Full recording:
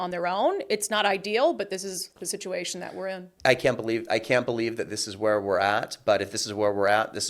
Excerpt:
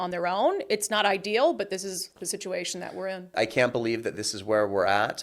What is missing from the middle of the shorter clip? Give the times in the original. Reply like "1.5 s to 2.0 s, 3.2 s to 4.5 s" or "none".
3.3 s to 4.0 s